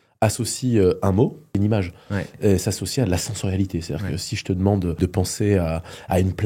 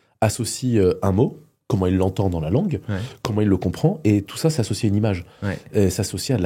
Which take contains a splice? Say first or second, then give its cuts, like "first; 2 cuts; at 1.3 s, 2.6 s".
first; 2 cuts; at 1.5 s, 5.0 s